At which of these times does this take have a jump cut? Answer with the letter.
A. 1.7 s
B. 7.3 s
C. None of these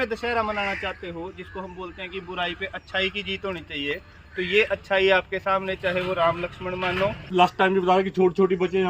B